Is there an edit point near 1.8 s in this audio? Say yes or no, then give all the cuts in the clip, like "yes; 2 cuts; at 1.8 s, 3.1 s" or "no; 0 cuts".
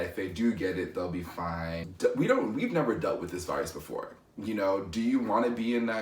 yes; 1 cut; at 1.8 s